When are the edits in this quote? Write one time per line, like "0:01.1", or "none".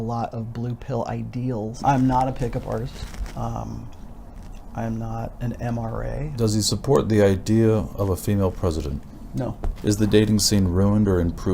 0:01.8
0:06.3
0:09.7